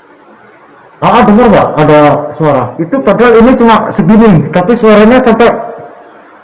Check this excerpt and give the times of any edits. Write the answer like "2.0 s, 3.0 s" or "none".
2.8 s